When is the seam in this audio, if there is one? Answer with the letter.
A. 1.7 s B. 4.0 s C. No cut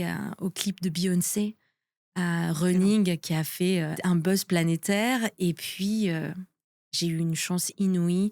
B